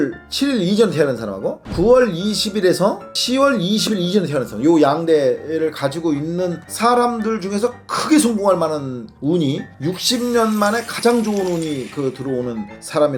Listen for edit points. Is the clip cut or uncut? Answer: uncut